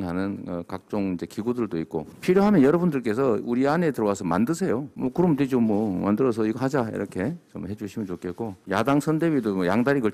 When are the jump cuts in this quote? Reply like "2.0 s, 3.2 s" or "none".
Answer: 8.6 s